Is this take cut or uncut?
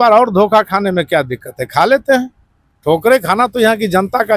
uncut